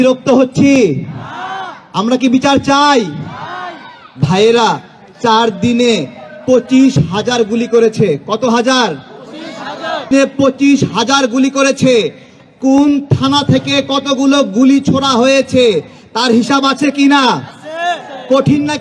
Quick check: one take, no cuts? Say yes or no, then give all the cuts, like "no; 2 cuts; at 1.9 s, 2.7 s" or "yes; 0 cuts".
no; 1 cut; at 10.1 s